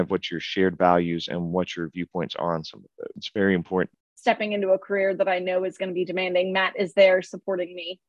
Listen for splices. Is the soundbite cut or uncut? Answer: cut